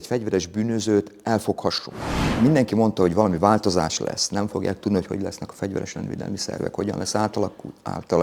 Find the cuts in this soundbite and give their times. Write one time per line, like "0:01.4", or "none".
0:02.2